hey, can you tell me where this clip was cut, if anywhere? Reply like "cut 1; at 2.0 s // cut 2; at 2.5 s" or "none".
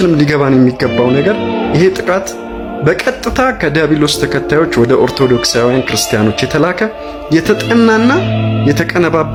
none